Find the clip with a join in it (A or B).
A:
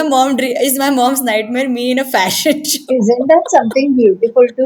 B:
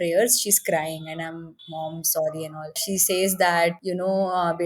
B